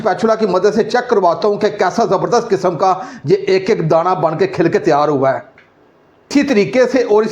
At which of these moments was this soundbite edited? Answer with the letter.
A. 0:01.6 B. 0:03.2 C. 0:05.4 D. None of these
D